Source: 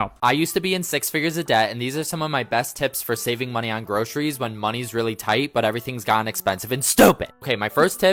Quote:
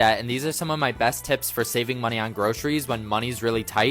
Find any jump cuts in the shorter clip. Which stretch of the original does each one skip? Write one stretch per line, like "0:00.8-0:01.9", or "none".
none